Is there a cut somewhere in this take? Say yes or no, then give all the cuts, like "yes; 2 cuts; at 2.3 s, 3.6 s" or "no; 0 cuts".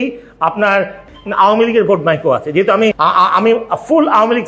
yes; 2 cuts; at 1.1 s, 3.0 s